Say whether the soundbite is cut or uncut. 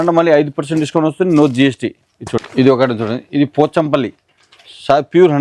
cut